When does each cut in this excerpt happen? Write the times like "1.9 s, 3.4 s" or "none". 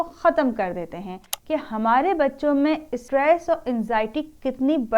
1.3 s, 2.9 s